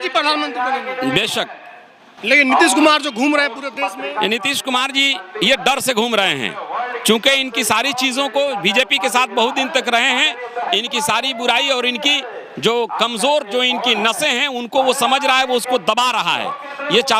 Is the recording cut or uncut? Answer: uncut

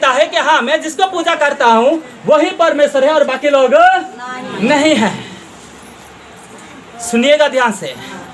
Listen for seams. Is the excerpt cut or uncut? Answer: uncut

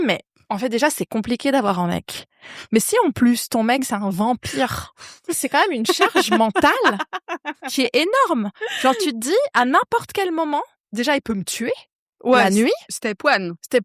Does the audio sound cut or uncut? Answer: uncut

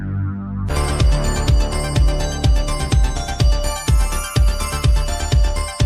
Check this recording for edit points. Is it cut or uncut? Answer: uncut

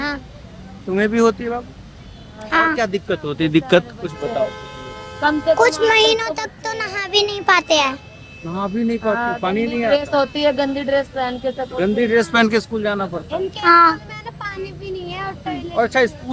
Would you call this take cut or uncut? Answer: uncut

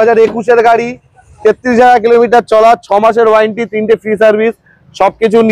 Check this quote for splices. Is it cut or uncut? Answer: uncut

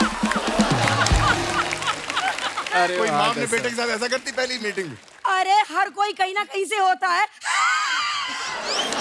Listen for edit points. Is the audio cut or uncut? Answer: uncut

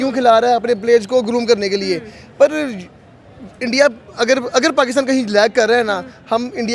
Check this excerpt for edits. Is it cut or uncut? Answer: uncut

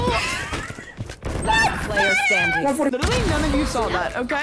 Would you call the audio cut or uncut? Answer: cut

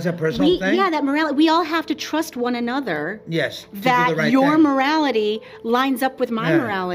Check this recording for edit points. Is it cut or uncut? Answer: uncut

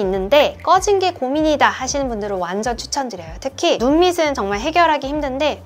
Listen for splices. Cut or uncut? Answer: uncut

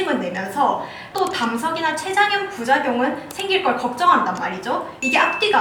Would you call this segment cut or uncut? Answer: cut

